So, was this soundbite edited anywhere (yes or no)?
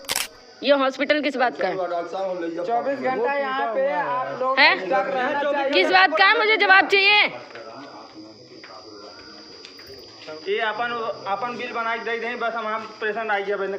no